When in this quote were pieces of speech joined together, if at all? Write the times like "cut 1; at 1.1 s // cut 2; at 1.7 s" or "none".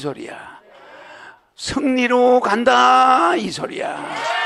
none